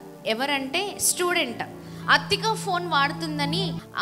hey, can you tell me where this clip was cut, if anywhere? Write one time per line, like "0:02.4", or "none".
none